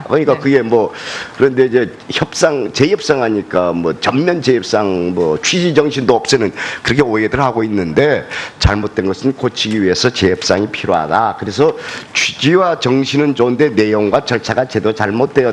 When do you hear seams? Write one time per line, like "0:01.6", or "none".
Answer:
none